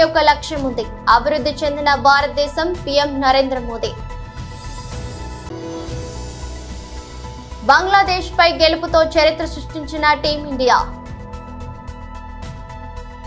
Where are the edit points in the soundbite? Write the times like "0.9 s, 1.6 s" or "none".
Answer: 3.9 s, 5.5 s, 7.3 s, 10.9 s